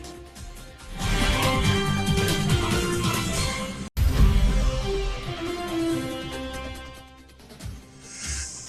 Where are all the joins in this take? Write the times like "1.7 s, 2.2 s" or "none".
3.7 s